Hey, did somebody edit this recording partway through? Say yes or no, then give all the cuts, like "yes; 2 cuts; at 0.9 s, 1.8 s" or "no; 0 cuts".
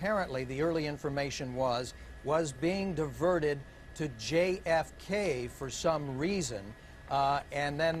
yes; 1 cut; at 2.0 s